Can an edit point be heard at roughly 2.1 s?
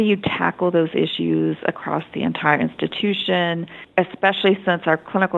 no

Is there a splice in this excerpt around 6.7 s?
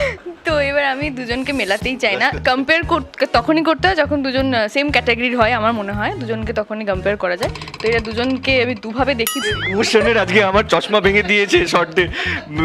no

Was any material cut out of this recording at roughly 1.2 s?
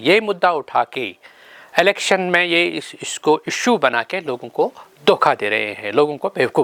no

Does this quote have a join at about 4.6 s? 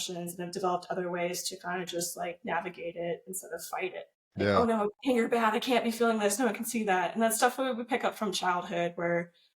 yes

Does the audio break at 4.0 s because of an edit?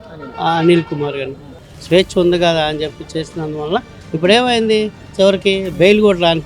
no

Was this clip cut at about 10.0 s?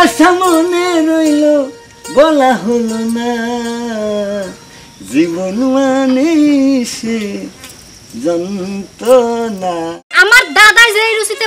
yes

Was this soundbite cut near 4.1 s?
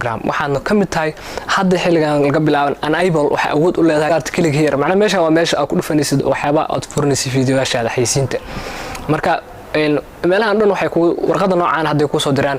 yes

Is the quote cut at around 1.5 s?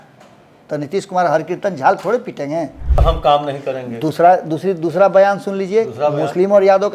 no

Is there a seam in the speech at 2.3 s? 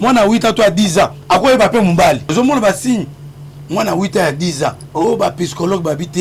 yes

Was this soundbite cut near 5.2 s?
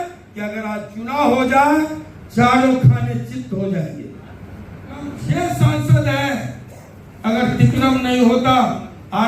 yes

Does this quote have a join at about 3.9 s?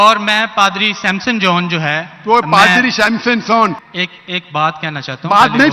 yes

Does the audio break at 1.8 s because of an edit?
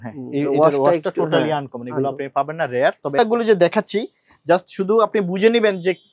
no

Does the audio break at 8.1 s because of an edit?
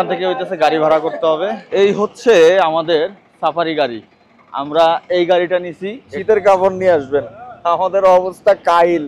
no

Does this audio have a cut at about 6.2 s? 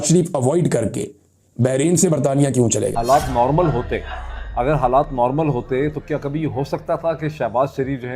no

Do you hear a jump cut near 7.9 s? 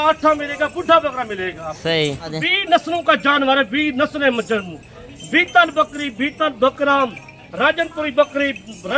no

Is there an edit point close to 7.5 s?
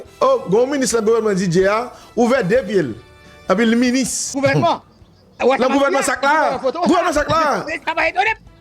no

